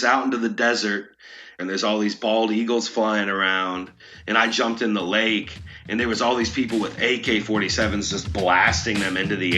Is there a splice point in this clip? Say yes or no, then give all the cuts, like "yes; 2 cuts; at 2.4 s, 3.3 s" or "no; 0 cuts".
yes; 1 cut; at 1.4 s